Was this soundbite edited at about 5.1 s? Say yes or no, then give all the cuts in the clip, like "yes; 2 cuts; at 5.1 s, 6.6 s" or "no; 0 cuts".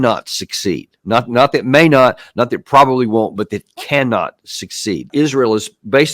yes; 1 cut; at 5.1 s